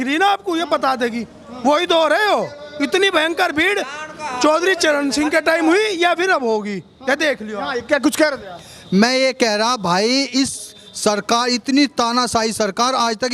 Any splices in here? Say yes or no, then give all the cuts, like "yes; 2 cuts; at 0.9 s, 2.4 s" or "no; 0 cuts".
no; 0 cuts